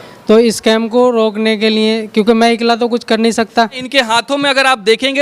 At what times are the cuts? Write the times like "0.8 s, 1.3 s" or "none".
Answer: 3.8 s

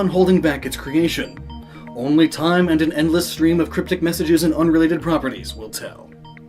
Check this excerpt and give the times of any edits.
3.5 s

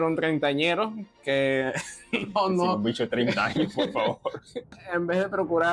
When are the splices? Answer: 4.8 s

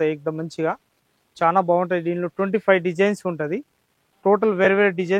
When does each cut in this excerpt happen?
none

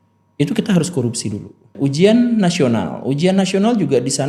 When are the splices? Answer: 1.7 s

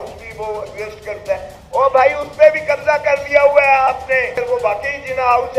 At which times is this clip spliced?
4.4 s

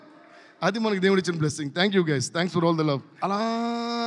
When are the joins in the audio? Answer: 3.1 s

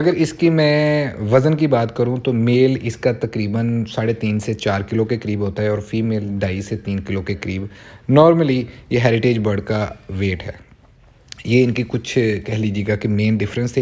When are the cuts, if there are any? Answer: none

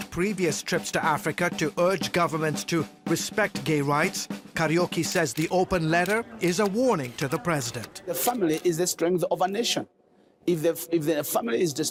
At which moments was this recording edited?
none

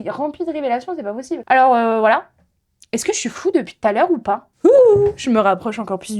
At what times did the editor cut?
none

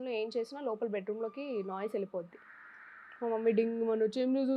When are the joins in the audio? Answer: none

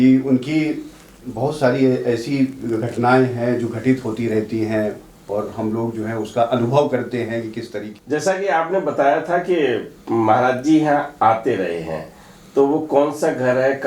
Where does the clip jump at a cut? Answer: 7.9 s

